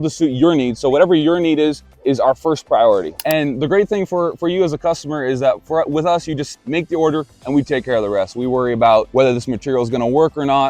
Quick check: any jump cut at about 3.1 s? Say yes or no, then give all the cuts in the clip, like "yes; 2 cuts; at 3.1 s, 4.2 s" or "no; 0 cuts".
yes; 2 cuts; at 3.1 s, 9.1 s